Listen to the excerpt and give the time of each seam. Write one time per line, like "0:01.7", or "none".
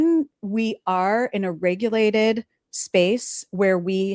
none